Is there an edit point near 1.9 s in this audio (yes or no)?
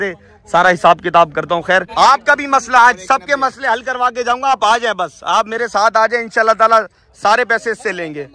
yes